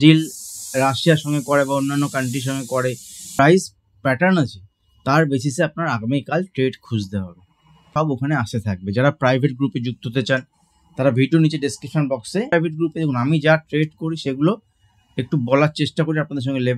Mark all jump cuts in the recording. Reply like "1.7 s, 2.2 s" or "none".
3.4 s, 7.9 s, 12.5 s